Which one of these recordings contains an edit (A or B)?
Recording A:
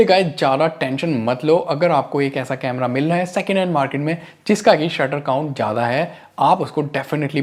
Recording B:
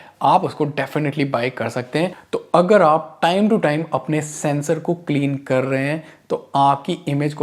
B